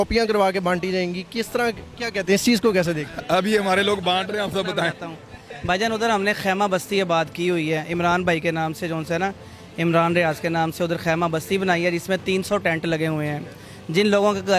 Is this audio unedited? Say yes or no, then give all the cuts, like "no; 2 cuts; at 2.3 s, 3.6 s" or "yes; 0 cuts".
yes; 0 cuts